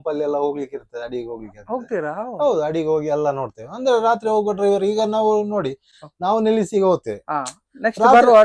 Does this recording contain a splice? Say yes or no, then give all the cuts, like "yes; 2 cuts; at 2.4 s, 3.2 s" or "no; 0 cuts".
no; 0 cuts